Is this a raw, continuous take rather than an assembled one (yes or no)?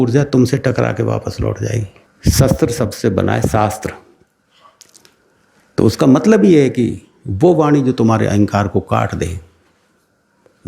no